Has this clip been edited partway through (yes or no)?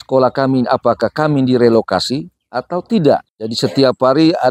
yes